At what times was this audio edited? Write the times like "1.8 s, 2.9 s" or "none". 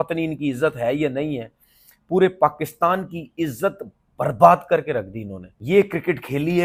none